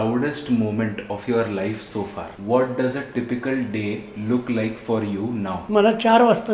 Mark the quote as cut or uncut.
cut